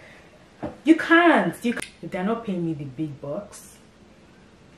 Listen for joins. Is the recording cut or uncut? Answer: cut